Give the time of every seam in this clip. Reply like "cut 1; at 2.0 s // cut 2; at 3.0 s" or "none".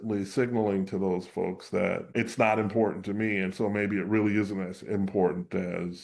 cut 1; at 2.1 s